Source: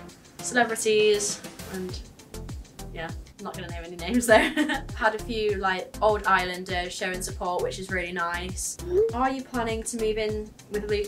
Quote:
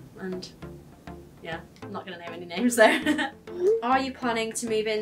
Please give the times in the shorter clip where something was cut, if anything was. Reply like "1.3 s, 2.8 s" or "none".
3.3 s